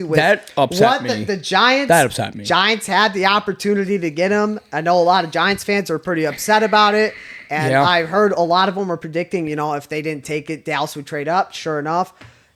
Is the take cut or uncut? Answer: uncut